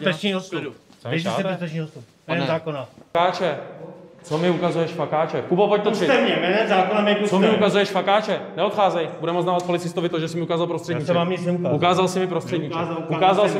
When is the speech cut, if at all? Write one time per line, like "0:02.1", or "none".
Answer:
0:03.0